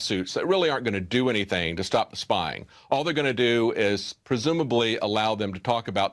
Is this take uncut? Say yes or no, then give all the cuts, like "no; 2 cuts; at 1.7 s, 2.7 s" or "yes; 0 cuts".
yes; 0 cuts